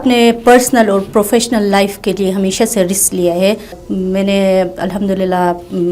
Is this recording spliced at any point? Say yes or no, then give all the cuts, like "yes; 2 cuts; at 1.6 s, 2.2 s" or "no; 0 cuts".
yes; 1 cut; at 3.8 s